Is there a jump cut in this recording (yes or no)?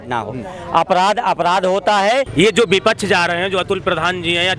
yes